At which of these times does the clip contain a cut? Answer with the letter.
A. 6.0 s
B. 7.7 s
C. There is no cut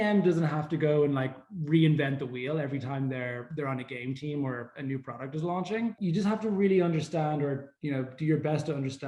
A